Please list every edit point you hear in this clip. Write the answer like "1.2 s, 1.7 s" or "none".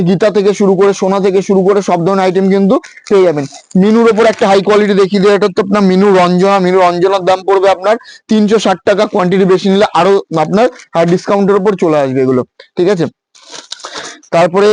none